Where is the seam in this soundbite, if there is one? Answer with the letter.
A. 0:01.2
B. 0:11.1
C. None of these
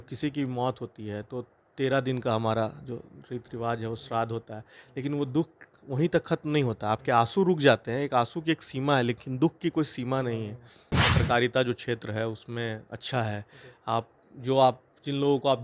B